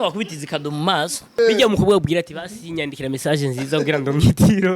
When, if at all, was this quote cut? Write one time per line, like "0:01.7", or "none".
0:01.2